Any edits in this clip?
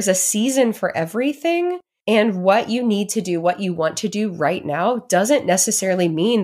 yes; 1 cut; at 1.9 s

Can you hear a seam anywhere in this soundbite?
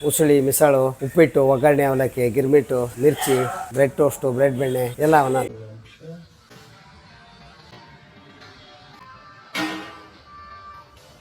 yes; 1 cut; at 5.5 s

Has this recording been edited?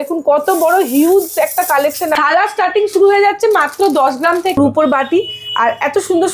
yes; 2 cuts; at 2.2 s, 4.6 s

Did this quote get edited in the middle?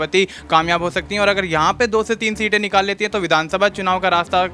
no; 0 cuts

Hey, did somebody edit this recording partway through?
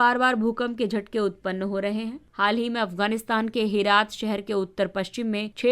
no; 0 cuts

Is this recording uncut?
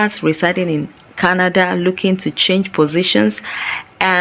yes; 0 cuts

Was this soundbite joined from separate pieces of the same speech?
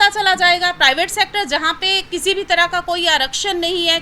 no; 0 cuts

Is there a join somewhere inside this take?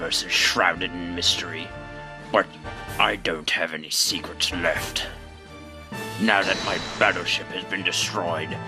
yes; 1 cut; at 7.3 s

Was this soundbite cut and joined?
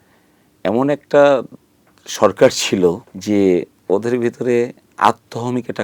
yes; 2 cuts; at 3.1 s, 3.7 s

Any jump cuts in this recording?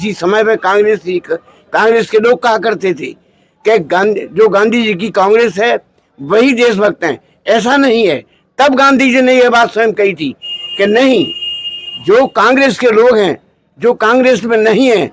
no; 0 cuts

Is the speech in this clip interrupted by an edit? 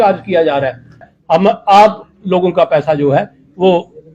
yes; 1 cut; at 1.0 s

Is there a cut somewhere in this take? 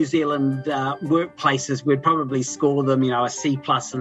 yes; 1 cut; at 0.9 s

